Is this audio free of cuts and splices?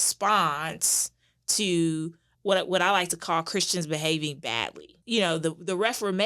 no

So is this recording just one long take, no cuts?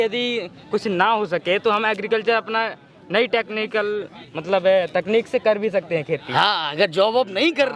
yes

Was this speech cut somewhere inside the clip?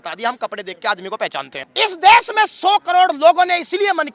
yes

